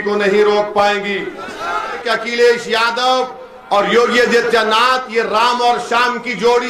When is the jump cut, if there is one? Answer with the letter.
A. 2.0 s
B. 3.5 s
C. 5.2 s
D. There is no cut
A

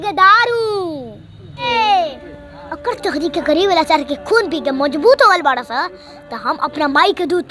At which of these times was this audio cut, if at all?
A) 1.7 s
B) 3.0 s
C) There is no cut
A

